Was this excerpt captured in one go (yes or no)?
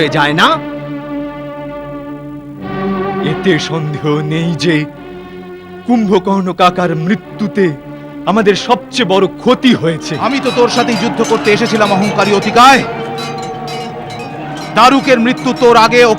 no